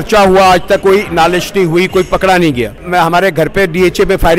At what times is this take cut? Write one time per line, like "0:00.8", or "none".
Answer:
0:00.8
0:02.8